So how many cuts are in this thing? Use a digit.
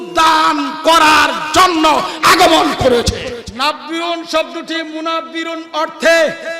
1